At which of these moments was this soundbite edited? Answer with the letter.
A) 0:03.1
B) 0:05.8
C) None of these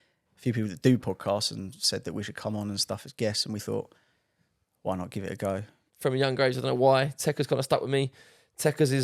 B